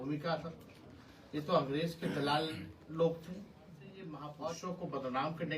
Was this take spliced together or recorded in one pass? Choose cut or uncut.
cut